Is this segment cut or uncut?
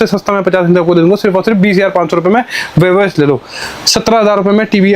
uncut